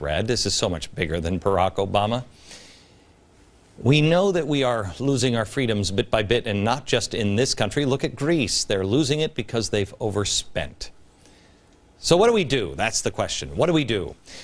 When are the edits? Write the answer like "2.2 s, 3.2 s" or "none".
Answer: 7.7 s